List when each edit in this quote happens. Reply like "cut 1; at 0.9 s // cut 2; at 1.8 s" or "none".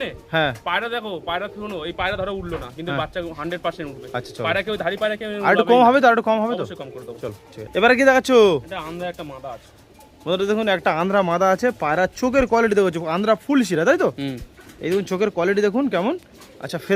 none